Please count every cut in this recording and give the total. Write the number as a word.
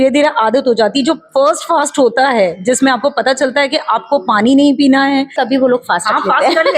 one